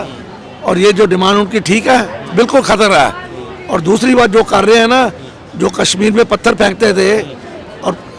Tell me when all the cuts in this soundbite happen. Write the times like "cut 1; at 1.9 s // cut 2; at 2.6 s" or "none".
none